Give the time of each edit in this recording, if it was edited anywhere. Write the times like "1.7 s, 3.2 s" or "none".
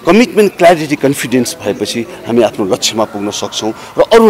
none